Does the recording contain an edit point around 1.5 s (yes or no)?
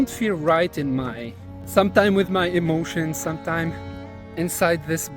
yes